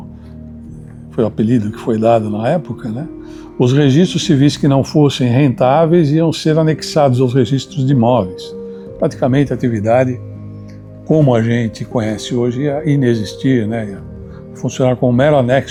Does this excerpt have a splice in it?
no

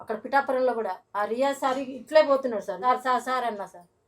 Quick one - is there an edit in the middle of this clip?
yes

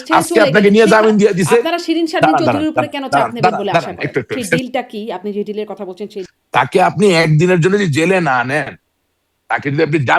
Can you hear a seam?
yes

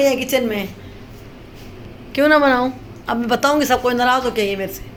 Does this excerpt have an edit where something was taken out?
no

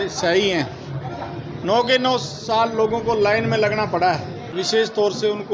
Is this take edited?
yes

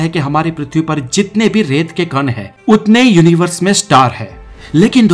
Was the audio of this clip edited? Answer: yes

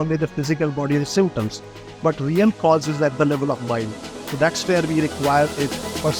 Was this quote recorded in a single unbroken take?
yes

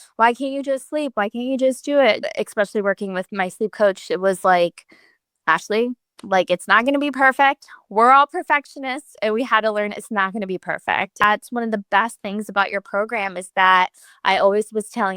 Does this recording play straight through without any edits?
no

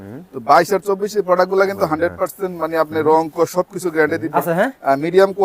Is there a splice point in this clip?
yes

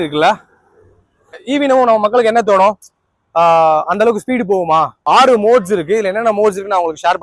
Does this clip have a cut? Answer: yes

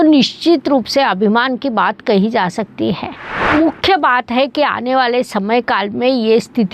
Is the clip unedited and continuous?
no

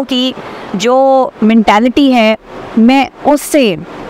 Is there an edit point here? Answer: no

